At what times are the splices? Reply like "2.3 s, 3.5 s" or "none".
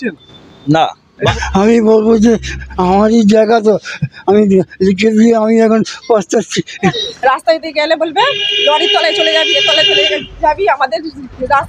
1.4 s, 7.0 s